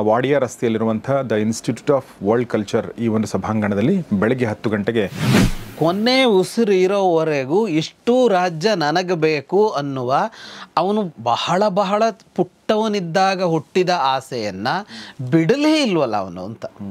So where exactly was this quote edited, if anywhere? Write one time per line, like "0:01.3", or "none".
0:05.6